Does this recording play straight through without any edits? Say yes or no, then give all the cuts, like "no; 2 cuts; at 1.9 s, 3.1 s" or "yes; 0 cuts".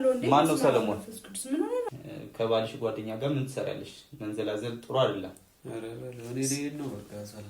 no; 1 cut; at 1.9 s